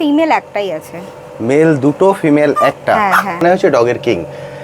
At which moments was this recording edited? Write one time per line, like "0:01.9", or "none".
0:03.4